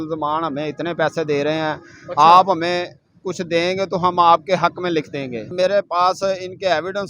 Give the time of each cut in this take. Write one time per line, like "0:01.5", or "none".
0:05.5